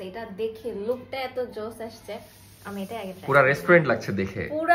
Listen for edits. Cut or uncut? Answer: uncut